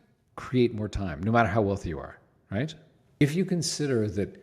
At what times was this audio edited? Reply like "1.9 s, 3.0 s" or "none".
3.2 s